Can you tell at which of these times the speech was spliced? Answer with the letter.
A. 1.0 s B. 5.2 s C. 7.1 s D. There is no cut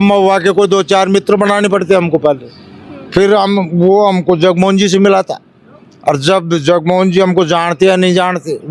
D